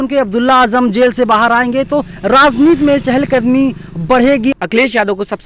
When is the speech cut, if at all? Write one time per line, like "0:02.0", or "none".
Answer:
0:04.5